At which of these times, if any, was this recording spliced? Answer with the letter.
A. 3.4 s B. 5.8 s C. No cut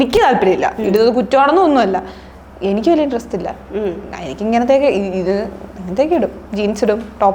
C